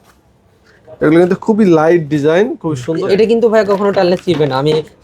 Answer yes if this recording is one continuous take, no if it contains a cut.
no